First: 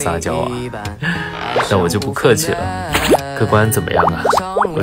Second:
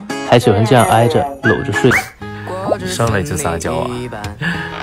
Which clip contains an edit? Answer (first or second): second